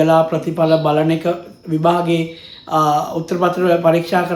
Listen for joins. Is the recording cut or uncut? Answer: uncut